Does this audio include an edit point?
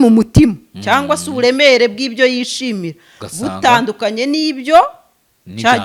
no; 0 cuts

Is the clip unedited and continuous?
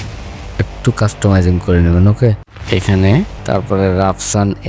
no; 2 cuts; at 2.5 s, 3.4 s

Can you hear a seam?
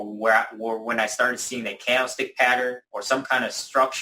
yes; 1 cut; at 2.9 s

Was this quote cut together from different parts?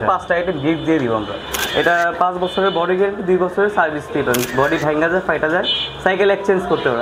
yes; 1 cut; at 1.5 s

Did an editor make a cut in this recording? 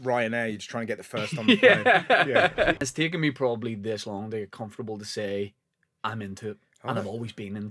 yes; 1 cut; at 2.7 s

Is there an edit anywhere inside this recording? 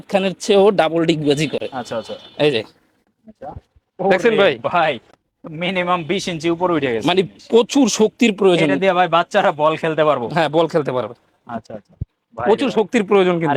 no; 0 cuts

